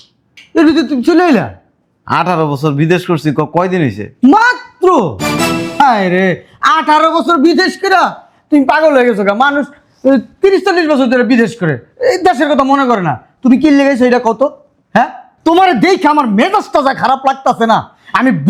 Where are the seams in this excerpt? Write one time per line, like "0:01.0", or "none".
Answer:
none